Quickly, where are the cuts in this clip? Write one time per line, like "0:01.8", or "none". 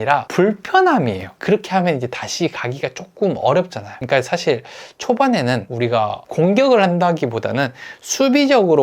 0:01.4
0:05.7